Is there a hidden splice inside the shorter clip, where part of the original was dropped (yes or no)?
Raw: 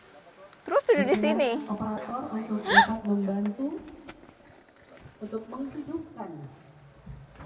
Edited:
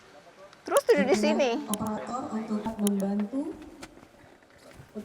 yes